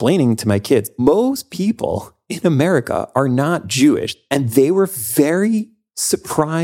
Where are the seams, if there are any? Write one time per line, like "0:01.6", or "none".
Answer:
0:00.9
0:04.1